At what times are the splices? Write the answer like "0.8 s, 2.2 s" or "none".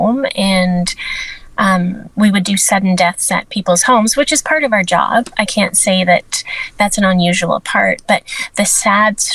none